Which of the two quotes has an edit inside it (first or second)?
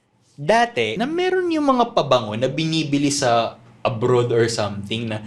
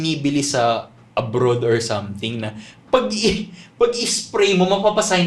first